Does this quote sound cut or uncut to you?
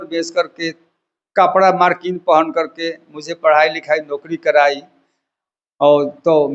uncut